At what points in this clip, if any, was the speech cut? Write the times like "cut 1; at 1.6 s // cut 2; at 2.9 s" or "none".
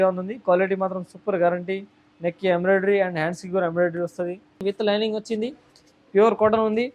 cut 1; at 4.6 s